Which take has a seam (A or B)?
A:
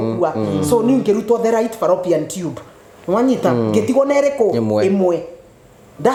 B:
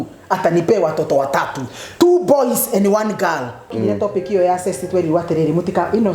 B